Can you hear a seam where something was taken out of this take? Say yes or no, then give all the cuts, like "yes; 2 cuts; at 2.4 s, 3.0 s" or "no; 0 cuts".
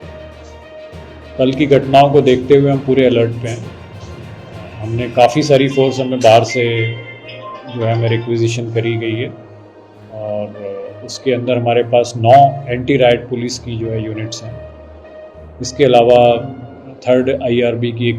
yes; 1 cut; at 1.4 s